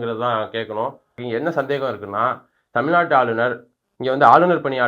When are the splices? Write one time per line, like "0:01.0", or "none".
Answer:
0:01.1